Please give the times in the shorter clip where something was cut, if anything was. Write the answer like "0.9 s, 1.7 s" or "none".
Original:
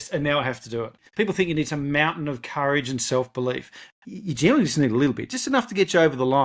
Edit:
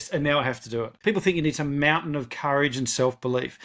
0.9 s